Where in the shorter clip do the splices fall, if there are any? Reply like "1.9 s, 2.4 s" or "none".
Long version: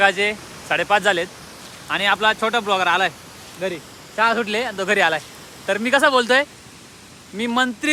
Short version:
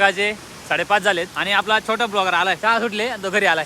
1.4 s, 2.6 s